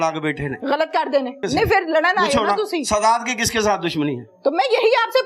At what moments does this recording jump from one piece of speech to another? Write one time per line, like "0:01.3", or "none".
0:01.4